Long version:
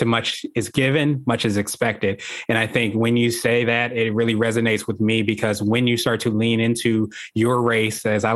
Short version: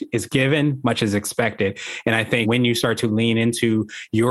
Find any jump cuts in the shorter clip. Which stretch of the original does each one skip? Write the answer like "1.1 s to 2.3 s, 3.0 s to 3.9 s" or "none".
2.9 s to 5.7 s